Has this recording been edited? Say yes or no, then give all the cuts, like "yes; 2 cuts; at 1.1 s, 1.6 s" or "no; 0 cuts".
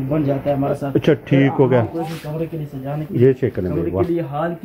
yes; 1 cut; at 1.9 s